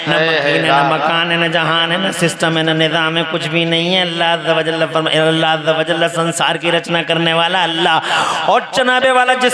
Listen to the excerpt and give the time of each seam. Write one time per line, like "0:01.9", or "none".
none